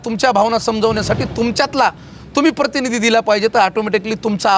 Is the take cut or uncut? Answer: uncut